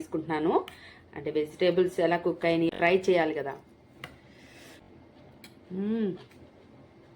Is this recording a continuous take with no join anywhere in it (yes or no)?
no